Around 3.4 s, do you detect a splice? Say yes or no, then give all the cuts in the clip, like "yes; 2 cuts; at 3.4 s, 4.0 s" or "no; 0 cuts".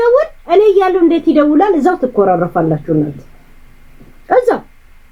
no; 0 cuts